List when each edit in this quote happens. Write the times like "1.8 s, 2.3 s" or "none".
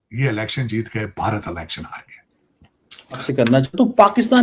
3.3 s